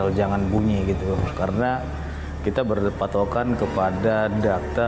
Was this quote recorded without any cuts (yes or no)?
yes